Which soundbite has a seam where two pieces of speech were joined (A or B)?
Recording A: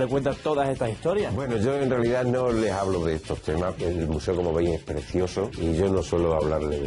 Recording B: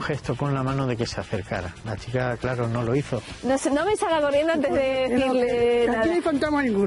A